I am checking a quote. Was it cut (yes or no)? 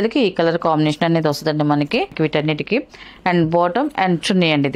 yes